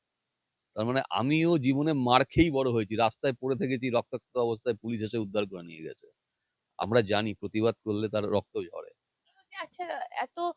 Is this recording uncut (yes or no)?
yes